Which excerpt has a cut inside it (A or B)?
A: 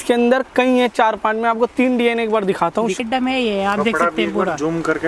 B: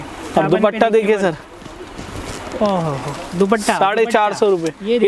A